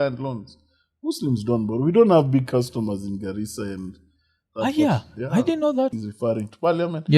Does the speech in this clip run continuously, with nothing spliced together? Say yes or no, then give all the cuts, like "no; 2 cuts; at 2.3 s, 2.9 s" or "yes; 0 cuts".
no; 1 cut; at 6.0 s